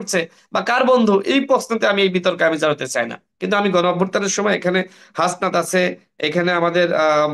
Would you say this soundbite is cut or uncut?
uncut